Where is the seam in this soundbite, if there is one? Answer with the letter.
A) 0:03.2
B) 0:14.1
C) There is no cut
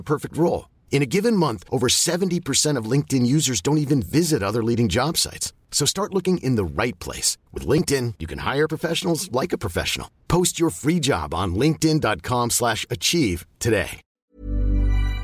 B